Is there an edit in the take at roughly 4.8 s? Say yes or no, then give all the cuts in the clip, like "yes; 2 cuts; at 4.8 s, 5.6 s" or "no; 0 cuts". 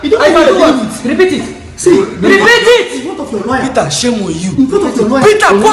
yes; 1 cut; at 4.8 s